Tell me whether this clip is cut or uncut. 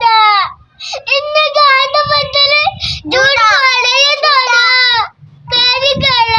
cut